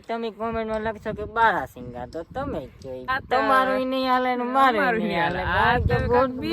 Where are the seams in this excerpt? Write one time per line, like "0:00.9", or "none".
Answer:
0:03.0